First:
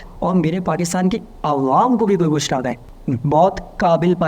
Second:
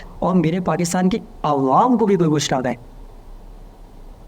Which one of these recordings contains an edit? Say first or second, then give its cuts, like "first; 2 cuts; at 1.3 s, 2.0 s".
first; 1 cut; at 2.9 s